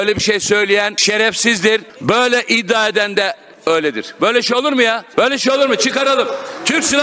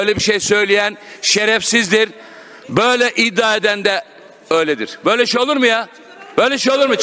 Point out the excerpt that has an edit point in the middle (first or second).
first